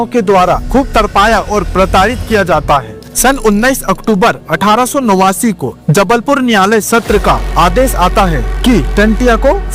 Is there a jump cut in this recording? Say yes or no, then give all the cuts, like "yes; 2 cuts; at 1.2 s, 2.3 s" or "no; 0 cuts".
no; 0 cuts